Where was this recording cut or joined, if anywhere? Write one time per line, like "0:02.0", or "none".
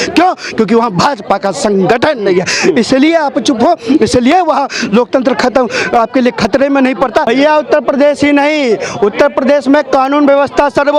0:07.3